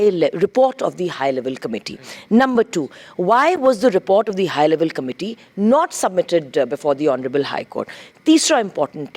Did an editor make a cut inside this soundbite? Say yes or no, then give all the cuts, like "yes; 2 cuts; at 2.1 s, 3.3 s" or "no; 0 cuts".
no; 0 cuts